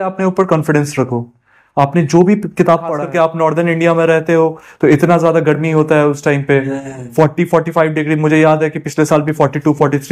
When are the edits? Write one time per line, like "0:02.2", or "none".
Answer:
0:03.0